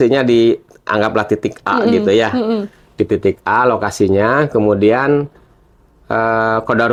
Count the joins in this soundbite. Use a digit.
0